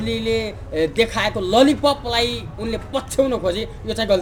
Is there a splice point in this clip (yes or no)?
no